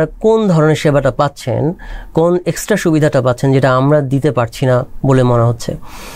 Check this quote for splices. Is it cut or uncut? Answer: uncut